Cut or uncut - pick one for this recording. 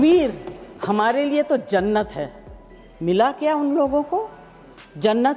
uncut